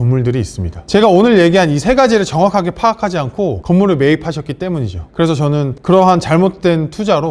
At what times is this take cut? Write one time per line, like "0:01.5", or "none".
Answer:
none